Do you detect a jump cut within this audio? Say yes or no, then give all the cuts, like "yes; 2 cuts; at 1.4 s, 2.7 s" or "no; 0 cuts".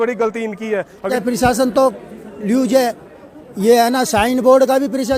yes; 1 cut; at 1.2 s